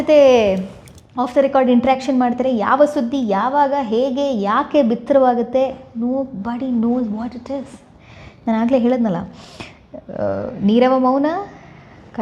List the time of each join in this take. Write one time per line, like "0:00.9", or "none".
none